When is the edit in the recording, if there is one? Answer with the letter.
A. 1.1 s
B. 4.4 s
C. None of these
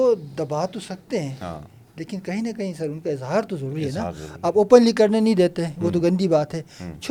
C